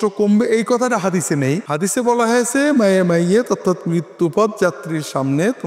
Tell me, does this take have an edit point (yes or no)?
yes